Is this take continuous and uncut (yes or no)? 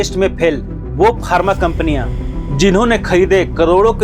yes